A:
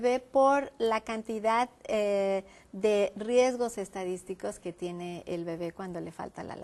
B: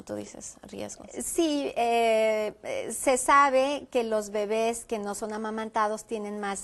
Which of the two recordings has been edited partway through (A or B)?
B